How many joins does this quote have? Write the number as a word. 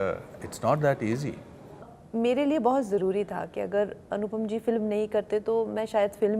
one